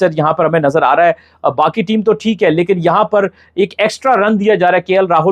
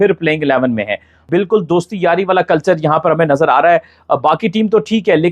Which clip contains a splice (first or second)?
second